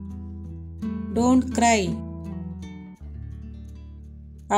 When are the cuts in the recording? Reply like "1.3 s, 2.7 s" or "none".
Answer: none